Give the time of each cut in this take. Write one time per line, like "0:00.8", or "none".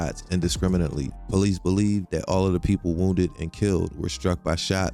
0:01.1